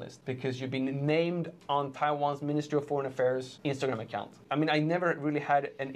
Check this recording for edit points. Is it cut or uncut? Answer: uncut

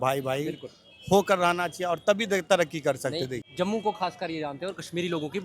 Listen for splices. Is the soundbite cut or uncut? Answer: cut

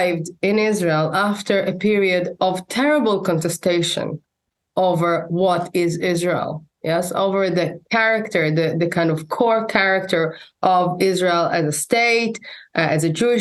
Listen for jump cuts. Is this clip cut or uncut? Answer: uncut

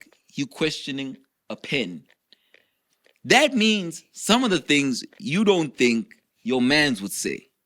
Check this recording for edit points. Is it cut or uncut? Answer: uncut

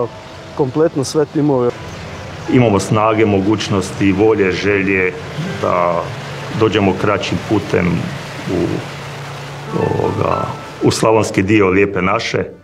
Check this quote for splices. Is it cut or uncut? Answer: cut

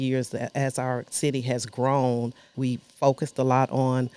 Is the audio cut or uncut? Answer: cut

